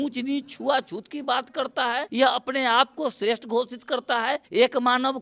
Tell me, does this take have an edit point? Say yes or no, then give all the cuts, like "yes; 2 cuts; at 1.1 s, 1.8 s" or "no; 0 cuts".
yes; 2 cuts; at 2.1 s, 4.4 s